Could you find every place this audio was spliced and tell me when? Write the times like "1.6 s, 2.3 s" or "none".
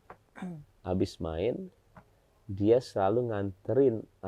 none

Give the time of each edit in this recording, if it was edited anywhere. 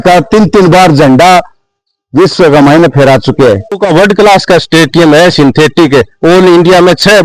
3.8 s

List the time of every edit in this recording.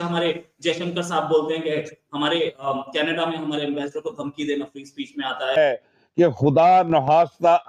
5.6 s

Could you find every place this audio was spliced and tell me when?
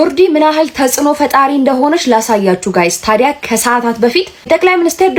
none

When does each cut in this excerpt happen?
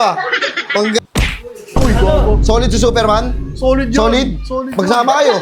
1.0 s

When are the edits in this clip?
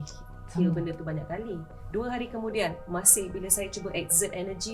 1.7 s

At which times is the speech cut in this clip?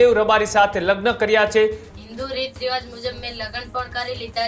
1.9 s

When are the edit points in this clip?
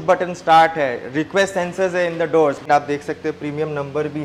2.6 s

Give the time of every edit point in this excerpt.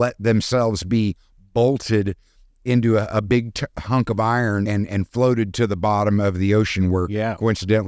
4.7 s

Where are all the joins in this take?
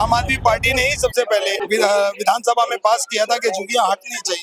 1.6 s

